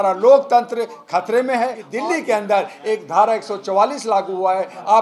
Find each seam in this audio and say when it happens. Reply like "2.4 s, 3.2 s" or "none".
1.8 s